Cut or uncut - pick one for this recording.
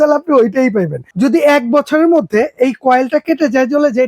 cut